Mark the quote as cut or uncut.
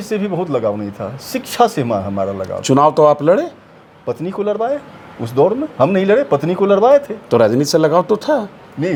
uncut